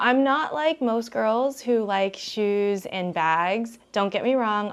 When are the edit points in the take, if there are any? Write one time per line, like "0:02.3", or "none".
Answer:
none